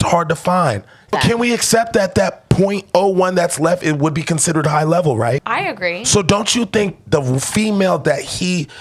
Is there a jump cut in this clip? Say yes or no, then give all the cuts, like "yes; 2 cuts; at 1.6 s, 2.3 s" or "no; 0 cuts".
yes; 2 cuts; at 1.1 s, 5.4 s